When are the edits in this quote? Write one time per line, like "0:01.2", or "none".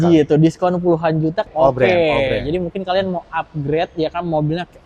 0:01.4